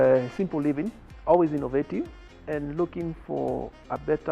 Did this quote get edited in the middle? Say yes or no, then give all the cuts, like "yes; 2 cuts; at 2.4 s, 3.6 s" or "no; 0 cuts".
yes; 2 cuts; at 1.0 s, 2.3 s